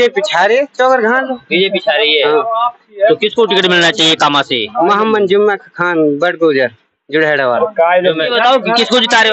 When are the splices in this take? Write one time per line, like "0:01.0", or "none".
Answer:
0:08.3